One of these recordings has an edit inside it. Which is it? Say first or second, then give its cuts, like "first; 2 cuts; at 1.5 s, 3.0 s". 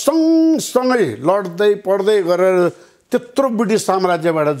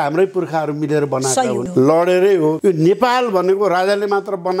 second; 2 cuts; at 1.7 s, 2.6 s